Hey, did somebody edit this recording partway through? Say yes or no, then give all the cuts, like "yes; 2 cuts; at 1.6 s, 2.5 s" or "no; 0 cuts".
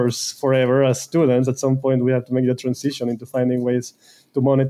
no; 0 cuts